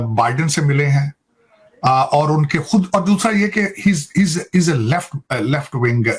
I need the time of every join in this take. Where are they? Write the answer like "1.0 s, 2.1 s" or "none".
none